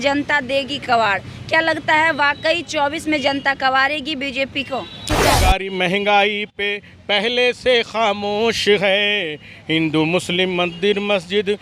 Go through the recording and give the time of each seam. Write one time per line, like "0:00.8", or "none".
0:05.4